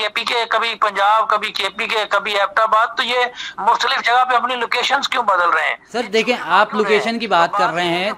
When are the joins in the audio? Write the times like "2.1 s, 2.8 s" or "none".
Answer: none